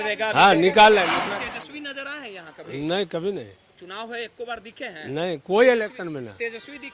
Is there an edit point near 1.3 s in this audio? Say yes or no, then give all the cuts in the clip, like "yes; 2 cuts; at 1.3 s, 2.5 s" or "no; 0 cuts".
yes; 1 cut; at 1.3 s